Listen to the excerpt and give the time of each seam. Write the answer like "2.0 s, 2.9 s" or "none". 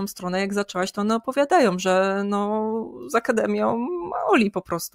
none